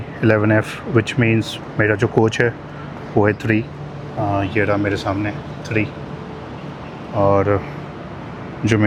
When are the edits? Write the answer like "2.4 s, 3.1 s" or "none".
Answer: none